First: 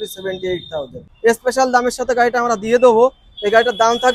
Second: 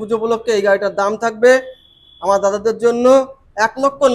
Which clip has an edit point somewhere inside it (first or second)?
first